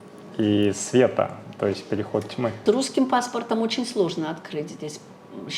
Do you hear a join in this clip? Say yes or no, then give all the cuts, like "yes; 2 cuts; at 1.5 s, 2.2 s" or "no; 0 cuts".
yes; 1 cut; at 2.6 s